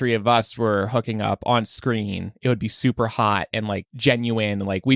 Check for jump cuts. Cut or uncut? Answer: uncut